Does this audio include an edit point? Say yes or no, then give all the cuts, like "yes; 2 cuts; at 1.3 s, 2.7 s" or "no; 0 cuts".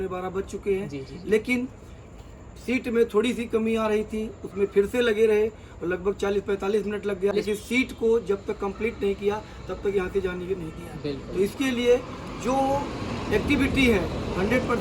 yes; 1 cut; at 7.3 s